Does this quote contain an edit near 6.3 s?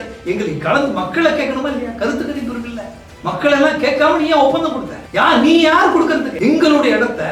yes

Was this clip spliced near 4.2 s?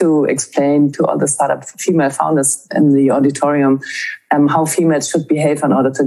no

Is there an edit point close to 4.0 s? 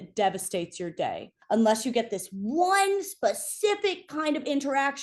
no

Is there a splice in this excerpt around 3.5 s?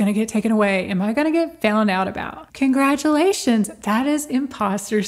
no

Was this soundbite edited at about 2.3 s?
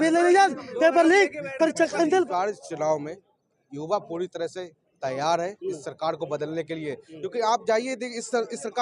yes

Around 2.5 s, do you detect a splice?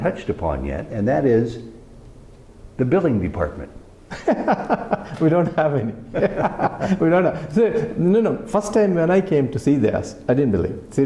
no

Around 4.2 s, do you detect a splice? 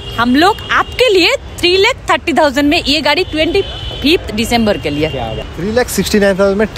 no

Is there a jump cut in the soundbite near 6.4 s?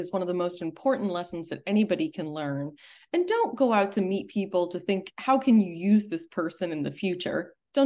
no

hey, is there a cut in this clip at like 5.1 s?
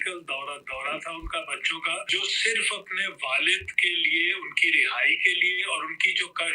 no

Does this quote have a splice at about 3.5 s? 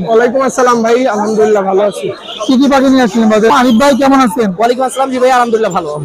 yes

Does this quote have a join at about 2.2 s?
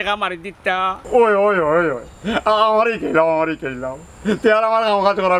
no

